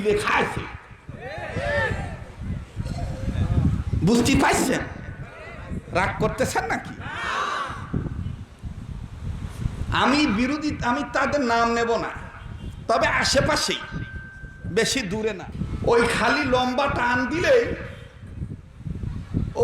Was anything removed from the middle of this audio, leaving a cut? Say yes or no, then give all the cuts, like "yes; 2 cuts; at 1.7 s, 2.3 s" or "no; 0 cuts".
yes; 1 cut; at 15.5 s